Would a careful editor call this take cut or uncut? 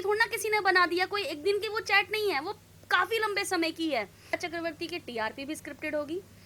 cut